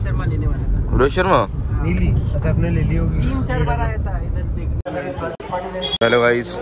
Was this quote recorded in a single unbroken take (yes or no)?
no